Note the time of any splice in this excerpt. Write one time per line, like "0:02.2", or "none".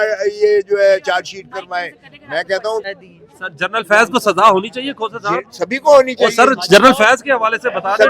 0:02.8

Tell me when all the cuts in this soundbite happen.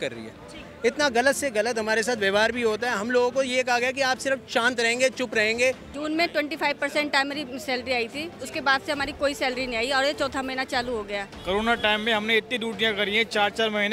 0:05.9
0:11.4

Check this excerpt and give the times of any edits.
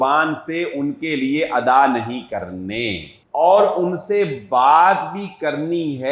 0:03.1

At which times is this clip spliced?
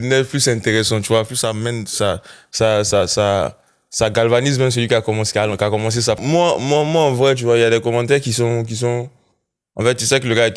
0:06.2

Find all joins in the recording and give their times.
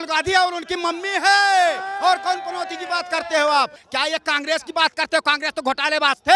0:03.8

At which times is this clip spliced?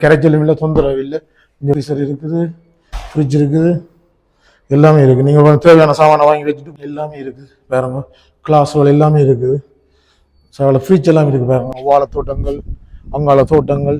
0:01.7
0:06.7
0:11.8

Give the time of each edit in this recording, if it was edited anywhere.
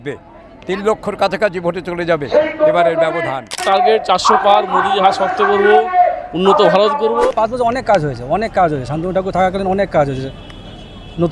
0:03.6
0:07.3

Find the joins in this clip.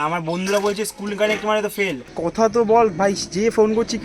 0:02.1

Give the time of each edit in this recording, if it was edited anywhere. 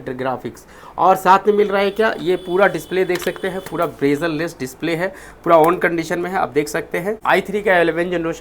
0:07.2

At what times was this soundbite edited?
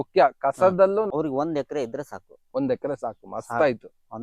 0:01.1

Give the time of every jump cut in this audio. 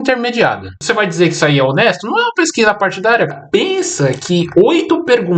0:00.7
0:03.3

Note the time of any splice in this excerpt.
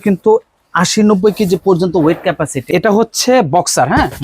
0:02.6

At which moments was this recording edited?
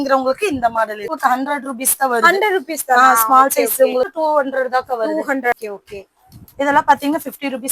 0:01.1
0:04.1
0:05.5

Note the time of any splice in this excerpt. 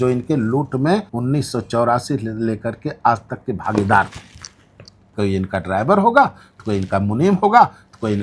none

